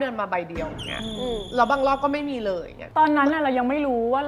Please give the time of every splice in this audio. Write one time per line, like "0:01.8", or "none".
none